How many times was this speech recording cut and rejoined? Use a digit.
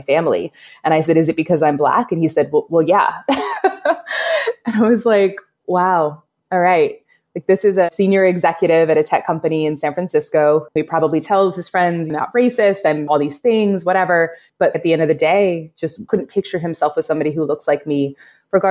2